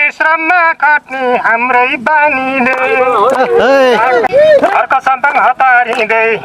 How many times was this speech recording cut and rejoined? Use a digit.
1